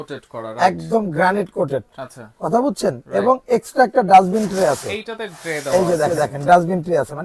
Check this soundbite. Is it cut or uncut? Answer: uncut